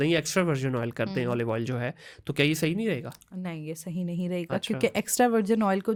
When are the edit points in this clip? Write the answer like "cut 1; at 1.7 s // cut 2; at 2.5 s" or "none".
none